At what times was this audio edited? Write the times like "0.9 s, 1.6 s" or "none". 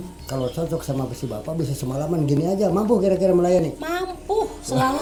none